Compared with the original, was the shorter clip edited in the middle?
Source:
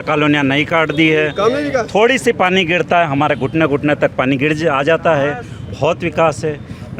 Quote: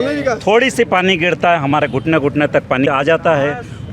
yes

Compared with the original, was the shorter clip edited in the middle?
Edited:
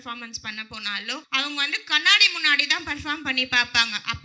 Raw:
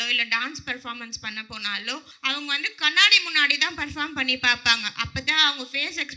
yes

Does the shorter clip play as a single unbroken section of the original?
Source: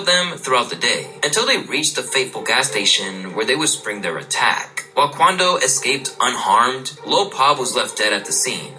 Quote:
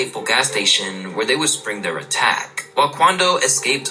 yes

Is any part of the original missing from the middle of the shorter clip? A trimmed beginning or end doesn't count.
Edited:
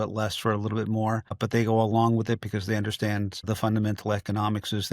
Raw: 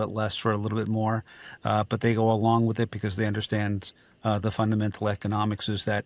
yes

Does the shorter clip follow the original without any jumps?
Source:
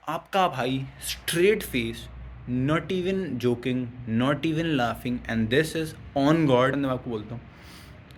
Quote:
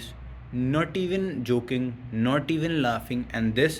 yes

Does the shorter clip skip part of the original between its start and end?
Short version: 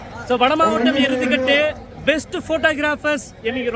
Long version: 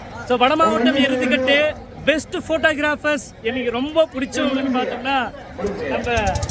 no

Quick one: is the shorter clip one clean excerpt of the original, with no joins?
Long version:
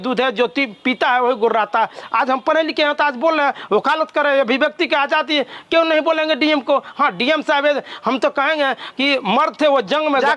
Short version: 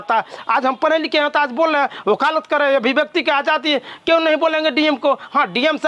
yes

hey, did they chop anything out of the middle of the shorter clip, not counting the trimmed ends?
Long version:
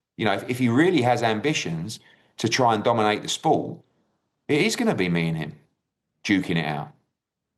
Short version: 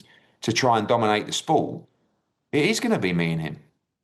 no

